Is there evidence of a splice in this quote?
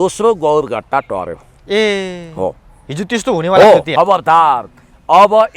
yes; 1 cut; at 3.9 s

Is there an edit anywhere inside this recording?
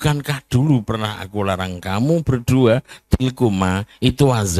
no; 0 cuts

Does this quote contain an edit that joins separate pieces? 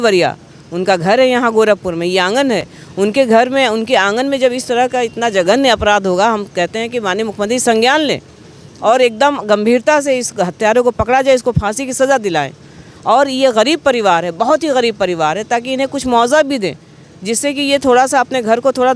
no; 0 cuts

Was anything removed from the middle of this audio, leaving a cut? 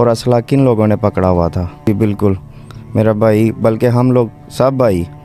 yes; 1 cut; at 1.9 s

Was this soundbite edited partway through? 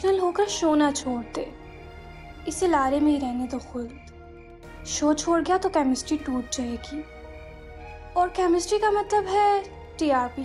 no; 0 cuts

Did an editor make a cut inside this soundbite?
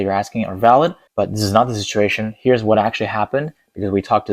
yes; 1 cut; at 1.0 s

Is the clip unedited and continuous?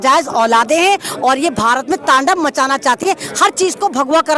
yes; 0 cuts

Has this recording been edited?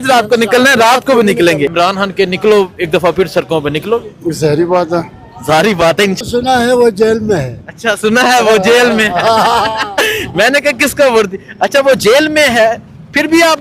yes; 2 cuts; at 1.7 s, 6.2 s

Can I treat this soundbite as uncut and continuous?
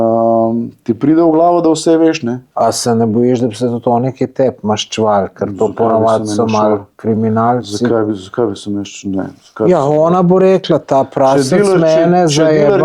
no; 1 cut; at 2.4 s

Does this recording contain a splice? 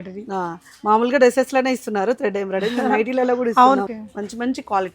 yes; 1 cut; at 3.9 s

